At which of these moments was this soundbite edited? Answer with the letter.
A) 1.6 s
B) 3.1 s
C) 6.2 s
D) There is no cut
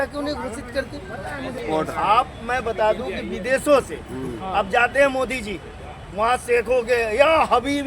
A